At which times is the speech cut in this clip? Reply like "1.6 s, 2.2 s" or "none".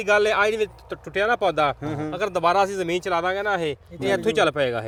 none